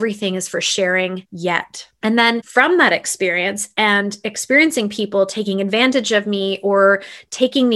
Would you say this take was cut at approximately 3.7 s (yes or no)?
no